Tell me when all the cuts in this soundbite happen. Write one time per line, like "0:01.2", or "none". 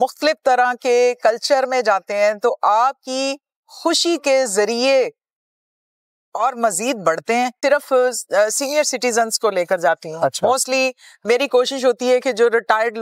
0:07.6